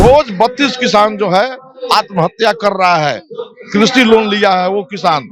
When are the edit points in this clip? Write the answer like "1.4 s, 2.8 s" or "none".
none

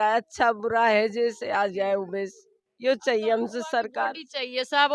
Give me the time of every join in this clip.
none

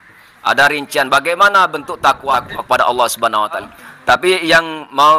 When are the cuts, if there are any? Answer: 2.3 s, 3.7 s

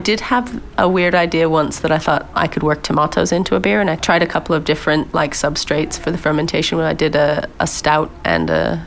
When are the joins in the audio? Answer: 2.3 s, 4.0 s

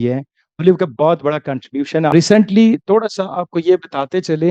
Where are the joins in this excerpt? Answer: 2.1 s

